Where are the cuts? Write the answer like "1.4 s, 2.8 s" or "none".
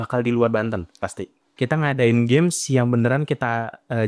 1.4 s

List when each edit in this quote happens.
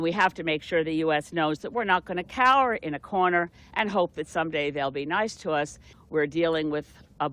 5.9 s

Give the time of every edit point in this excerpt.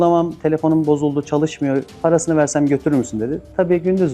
1.9 s

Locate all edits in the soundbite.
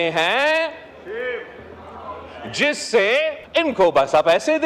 3.4 s

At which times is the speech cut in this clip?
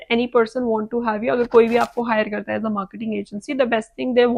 none

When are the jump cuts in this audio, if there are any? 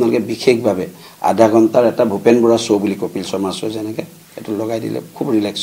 none

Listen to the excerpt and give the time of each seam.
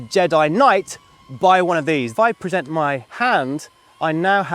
2.1 s, 3.1 s

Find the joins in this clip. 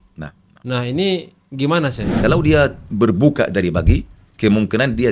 2.2 s

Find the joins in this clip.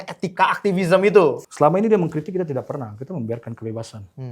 1.4 s

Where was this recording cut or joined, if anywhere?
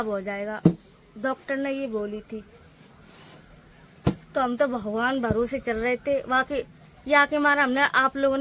none

